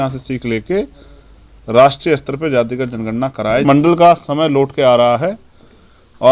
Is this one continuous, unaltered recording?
no; 1 cut; at 3.6 s

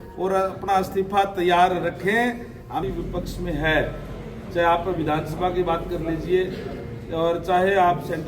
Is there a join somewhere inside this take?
yes; 1 cut; at 2.8 s

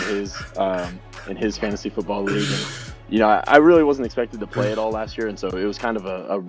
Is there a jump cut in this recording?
no; 0 cuts

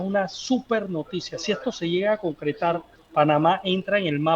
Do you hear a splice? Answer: yes; 1 cut; at 2.9 s

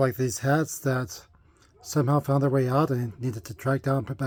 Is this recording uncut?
yes; 0 cuts

